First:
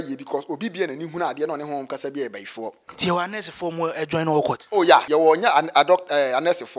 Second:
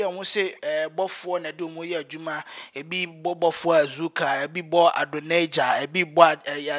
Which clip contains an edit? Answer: first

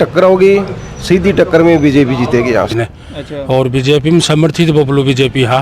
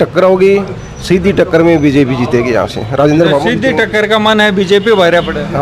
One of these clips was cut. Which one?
first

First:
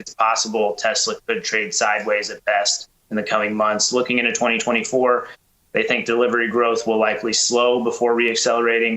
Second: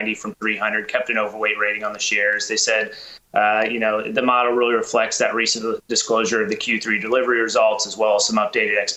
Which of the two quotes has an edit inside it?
first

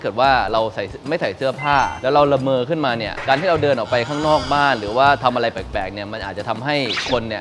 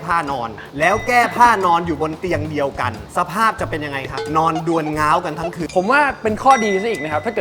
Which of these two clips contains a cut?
second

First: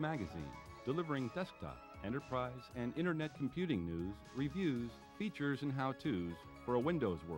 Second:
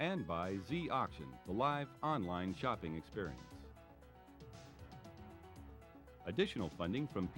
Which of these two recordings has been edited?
second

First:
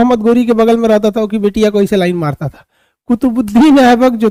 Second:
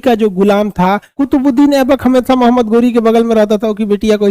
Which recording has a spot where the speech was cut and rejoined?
second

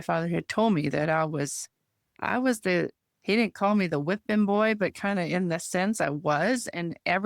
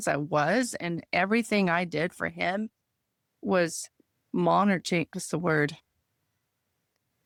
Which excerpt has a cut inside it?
first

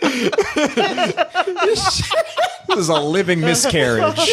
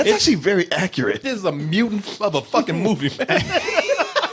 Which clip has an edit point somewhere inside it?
second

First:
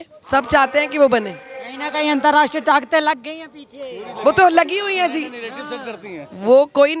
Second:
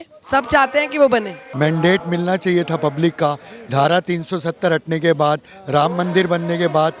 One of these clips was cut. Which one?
second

